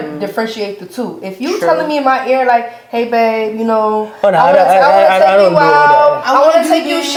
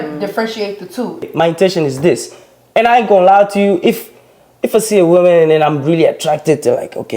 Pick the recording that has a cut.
second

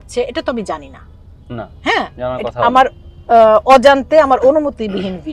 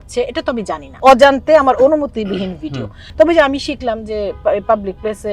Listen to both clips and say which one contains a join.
second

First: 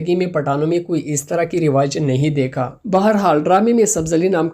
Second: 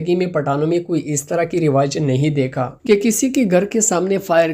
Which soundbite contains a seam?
first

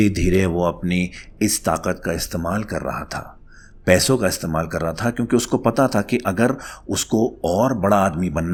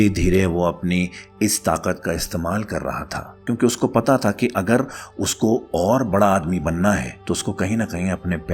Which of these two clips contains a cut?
second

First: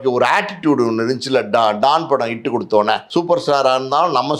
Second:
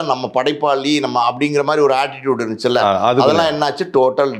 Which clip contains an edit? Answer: first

